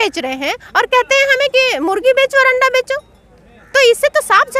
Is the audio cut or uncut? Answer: uncut